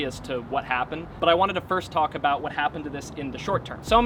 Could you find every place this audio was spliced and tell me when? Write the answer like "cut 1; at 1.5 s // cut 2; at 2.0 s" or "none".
none